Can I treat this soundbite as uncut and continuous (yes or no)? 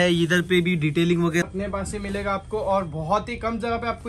no